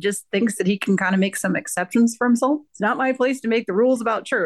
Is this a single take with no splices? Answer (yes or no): no